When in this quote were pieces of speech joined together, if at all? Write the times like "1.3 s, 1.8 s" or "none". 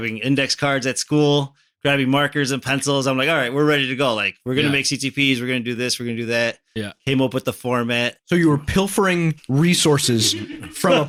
none